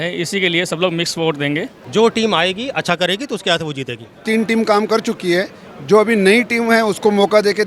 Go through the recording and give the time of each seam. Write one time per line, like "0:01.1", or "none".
0:01.8
0:04.2